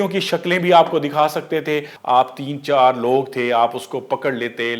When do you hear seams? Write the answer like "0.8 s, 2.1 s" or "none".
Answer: 1.9 s